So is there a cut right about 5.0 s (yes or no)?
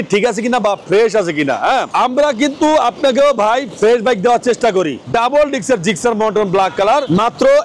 yes